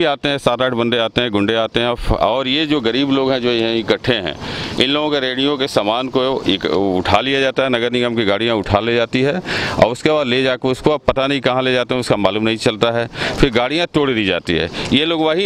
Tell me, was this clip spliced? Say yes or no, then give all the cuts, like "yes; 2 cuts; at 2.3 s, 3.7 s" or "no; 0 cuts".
no; 0 cuts